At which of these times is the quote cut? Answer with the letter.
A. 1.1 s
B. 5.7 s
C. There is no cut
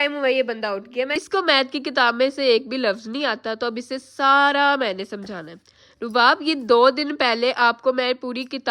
A